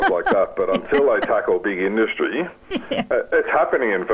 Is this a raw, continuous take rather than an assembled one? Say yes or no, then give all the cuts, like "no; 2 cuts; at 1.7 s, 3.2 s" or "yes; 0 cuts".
no; 1 cut; at 3.1 s